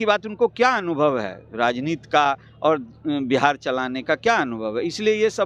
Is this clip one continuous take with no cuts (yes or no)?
yes